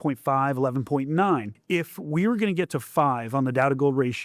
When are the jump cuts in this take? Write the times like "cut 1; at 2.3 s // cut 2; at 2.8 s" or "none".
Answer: cut 1; at 1.5 s